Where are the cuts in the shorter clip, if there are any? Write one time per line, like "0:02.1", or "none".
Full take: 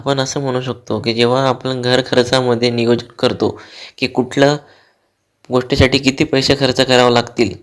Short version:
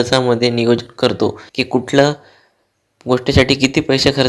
0:01.5